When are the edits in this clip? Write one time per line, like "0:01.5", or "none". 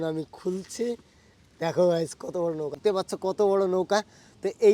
0:02.8